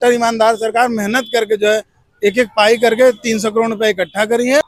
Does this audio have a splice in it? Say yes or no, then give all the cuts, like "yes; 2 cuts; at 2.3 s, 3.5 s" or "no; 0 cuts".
no; 0 cuts